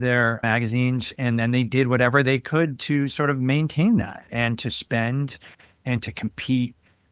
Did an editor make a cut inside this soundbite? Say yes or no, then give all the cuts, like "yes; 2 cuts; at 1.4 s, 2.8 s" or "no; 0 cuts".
no; 0 cuts